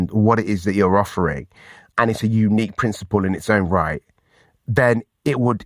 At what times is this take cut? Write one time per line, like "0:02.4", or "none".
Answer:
0:01.9